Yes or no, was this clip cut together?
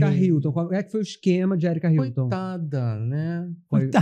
no